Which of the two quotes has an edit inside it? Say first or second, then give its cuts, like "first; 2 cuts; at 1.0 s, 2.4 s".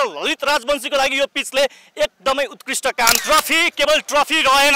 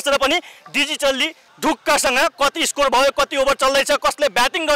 first; 1 cut; at 3.2 s